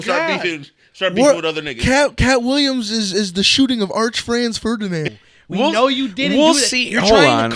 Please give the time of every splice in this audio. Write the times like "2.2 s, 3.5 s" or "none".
5.1 s